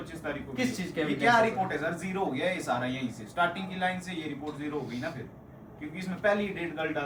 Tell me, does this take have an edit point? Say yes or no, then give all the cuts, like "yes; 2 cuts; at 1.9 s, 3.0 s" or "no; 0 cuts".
no; 0 cuts